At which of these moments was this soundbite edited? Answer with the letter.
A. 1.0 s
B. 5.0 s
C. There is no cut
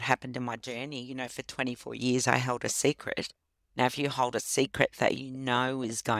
C